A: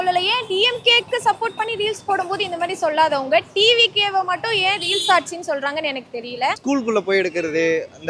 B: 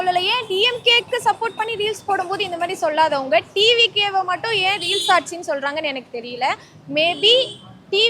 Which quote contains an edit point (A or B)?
A